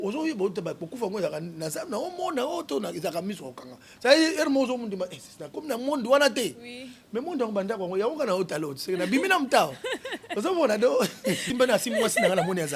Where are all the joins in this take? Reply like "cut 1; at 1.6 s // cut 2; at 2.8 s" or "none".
cut 1; at 11.5 s